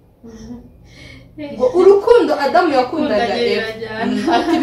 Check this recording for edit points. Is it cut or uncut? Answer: uncut